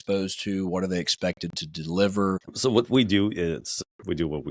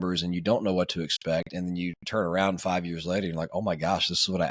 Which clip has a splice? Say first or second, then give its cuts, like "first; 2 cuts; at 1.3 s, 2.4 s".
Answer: first; 2 cuts; at 2.5 s, 3.8 s